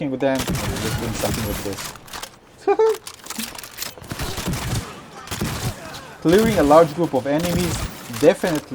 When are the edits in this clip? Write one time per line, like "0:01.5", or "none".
0:04.1